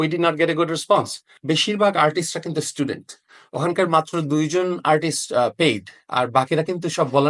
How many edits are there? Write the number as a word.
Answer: one